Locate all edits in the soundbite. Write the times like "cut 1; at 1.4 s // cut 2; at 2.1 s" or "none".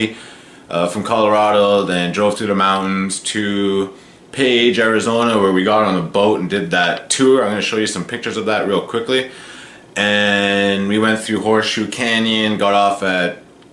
none